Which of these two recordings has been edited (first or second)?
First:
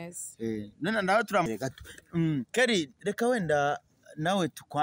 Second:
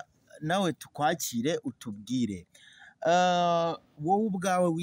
first